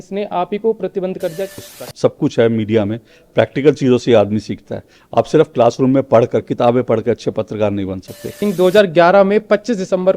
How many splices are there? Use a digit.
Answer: 2